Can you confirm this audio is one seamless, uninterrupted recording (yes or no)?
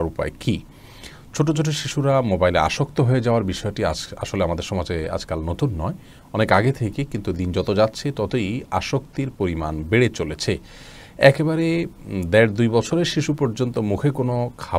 yes